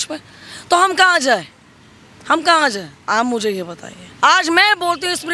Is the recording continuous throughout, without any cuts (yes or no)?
yes